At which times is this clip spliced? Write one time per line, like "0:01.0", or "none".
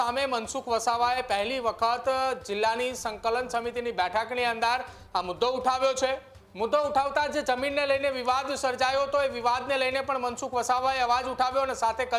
none

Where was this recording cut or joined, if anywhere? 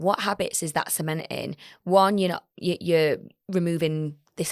none

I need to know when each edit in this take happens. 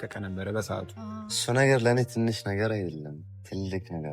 0:01.3

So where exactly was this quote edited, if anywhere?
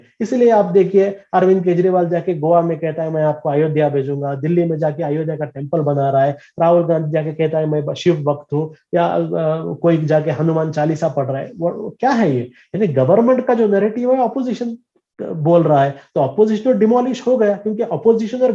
none

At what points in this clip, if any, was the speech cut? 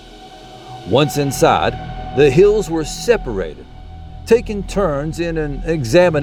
none

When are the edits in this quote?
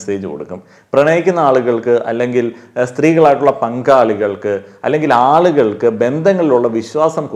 none

